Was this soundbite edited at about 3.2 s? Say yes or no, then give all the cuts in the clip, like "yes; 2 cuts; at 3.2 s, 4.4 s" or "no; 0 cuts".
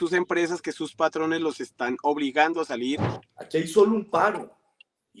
yes; 1 cut; at 3.2 s